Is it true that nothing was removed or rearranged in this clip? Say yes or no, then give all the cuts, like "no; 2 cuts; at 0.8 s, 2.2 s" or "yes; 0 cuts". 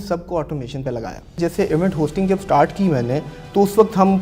no; 1 cut; at 1.4 s